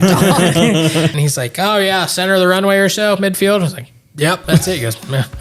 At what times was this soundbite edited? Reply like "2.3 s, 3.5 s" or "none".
1.1 s

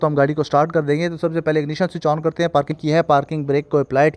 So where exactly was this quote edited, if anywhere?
2.8 s

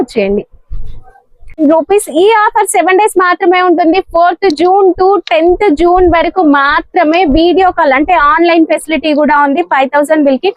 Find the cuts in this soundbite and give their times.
1.6 s

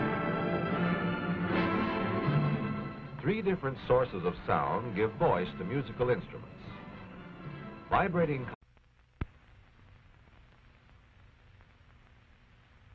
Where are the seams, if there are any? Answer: none

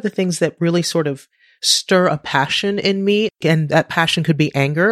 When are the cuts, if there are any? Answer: 3.4 s

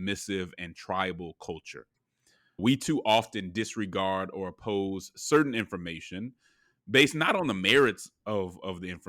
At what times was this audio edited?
2.6 s

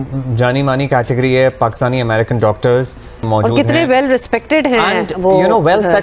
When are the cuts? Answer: 3.2 s

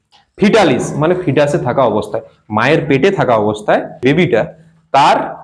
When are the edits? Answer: 4.0 s

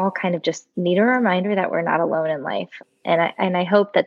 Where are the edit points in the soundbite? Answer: 2.8 s

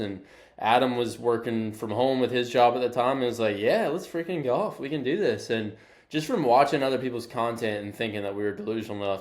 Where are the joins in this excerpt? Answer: none

